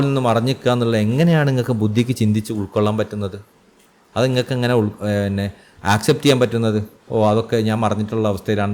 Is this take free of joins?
yes; 0 cuts

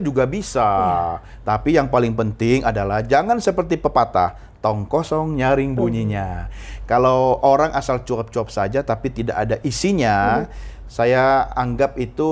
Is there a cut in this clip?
no; 0 cuts

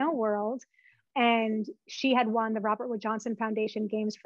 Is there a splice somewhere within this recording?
yes; 1 cut; at 1.0 s

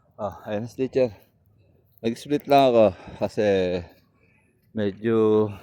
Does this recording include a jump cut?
no; 0 cuts

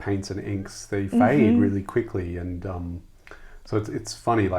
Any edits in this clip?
no; 0 cuts

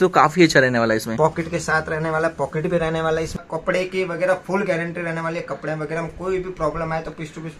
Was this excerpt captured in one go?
no; 1 cut; at 3.4 s

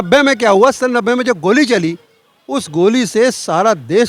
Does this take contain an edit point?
no; 0 cuts

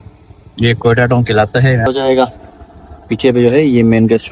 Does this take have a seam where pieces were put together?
yes; 1 cut; at 1.9 s

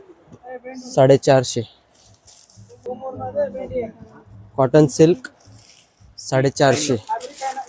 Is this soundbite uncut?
yes; 0 cuts

